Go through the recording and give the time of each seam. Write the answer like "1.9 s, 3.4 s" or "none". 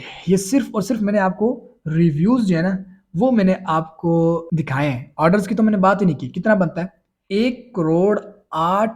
4.4 s, 7.2 s